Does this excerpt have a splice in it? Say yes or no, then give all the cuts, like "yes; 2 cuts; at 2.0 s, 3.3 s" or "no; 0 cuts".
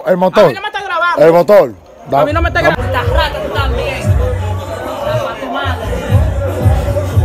yes; 1 cut; at 2.7 s